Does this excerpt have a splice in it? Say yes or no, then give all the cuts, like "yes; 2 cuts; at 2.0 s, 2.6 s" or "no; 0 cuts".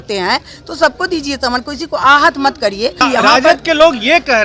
yes; 1 cut; at 3.0 s